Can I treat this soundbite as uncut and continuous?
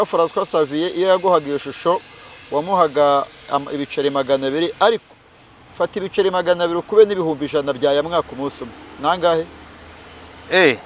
yes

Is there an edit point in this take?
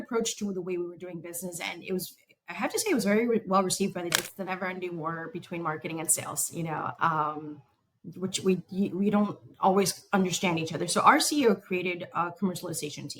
yes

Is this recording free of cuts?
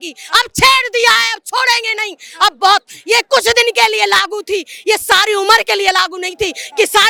yes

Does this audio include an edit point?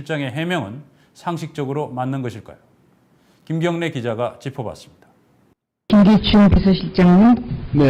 no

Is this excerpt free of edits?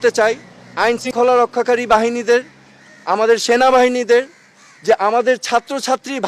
no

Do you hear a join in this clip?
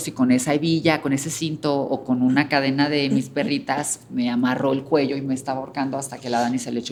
no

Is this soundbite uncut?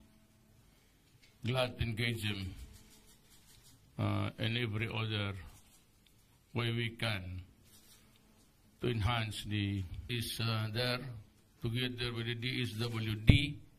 yes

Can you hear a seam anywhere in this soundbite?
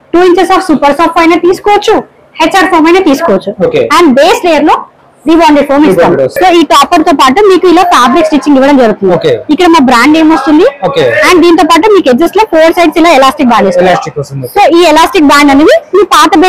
yes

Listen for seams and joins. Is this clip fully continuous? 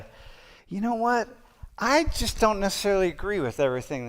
yes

